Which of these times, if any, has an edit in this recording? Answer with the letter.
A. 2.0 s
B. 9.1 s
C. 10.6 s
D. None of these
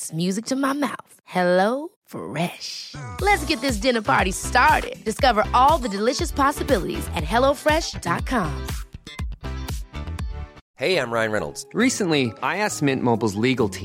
C